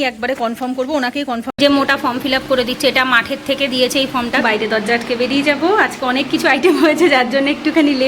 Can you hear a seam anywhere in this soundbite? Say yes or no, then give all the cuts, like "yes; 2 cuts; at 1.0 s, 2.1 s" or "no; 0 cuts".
yes; 2 cuts; at 1.6 s, 4.4 s